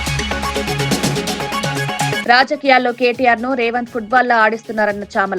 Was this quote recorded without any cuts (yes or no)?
no